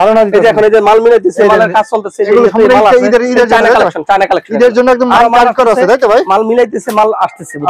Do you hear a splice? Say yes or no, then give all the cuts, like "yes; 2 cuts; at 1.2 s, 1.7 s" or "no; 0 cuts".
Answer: no; 0 cuts